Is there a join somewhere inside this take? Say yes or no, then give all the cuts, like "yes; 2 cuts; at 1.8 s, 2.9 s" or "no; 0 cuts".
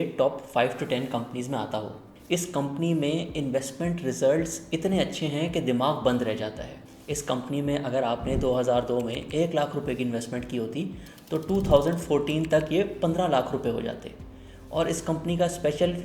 yes; 1 cut; at 2.1 s